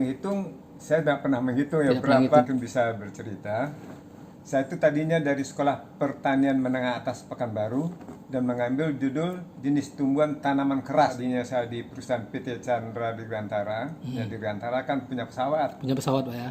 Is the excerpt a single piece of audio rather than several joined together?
no; 2 cuts; at 2.4 s, 11.2 s

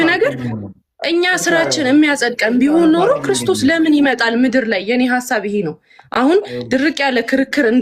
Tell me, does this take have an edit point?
no; 0 cuts

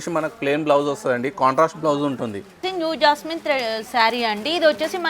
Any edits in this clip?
yes; 1 cut; at 2.7 s

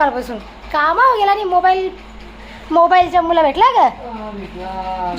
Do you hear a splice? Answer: no; 0 cuts

